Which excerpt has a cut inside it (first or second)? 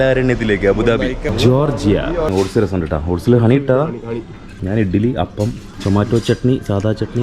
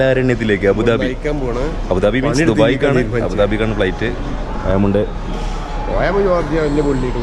first